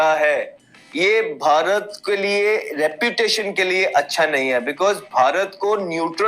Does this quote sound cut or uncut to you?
uncut